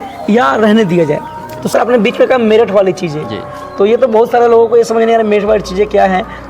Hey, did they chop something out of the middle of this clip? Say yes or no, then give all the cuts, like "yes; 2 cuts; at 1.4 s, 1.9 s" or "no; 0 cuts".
yes; 1 cut; at 1.6 s